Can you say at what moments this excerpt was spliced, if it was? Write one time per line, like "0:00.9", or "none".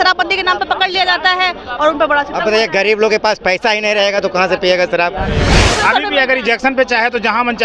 0:05.6